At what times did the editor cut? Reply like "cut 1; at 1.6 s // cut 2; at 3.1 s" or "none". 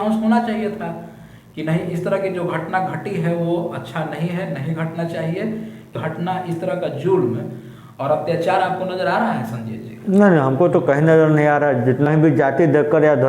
cut 1; at 5.9 s // cut 2; at 12.1 s